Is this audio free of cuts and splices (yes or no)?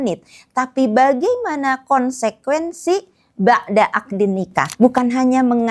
no